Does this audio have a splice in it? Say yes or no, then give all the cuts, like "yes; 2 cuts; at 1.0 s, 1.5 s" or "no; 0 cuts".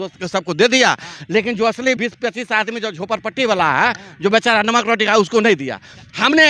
yes; 1 cut; at 2.0 s